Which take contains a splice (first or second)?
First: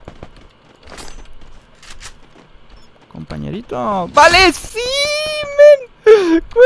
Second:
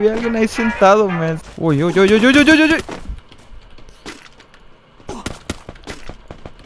second